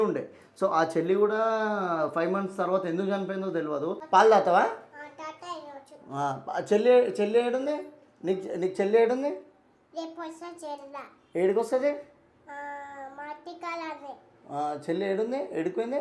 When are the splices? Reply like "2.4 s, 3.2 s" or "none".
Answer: 4.0 s